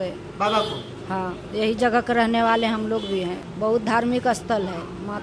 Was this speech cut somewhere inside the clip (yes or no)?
yes